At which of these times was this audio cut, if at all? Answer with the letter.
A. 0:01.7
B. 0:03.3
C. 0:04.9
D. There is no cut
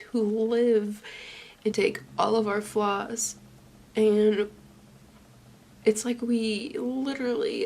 A